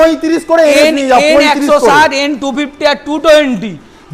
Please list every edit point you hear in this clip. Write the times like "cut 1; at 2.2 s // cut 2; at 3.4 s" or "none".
none

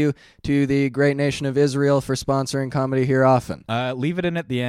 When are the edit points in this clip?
cut 1; at 3.6 s

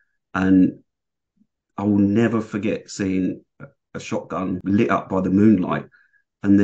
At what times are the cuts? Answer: cut 1; at 4.6 s

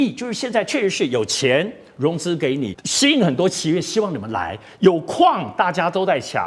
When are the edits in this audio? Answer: cut 1; at 2.8 s

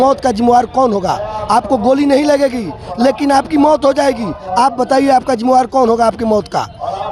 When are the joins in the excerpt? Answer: none

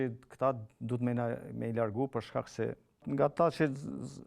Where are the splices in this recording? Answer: cut 1; at 2.9 s

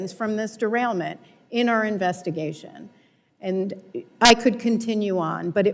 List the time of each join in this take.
none

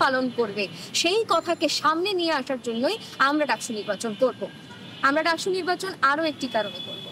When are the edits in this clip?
none

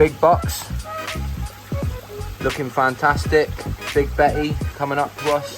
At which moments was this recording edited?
none

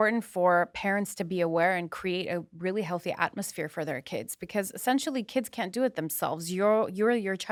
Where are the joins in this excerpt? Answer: none

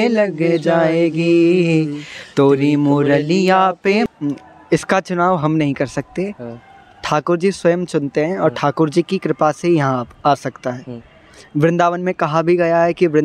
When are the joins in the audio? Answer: cut 1; at 4.1 s

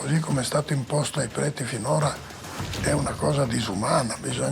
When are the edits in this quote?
none

